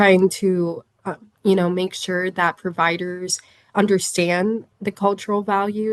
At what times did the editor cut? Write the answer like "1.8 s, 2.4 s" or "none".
none